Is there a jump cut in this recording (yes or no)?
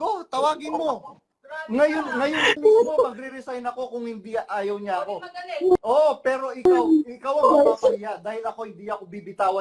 no